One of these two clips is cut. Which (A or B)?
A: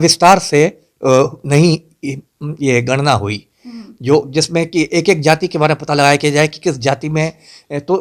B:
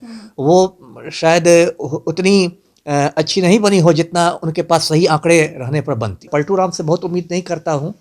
B